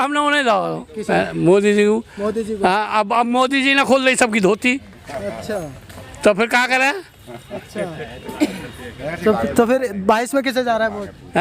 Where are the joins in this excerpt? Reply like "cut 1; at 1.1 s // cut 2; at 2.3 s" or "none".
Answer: none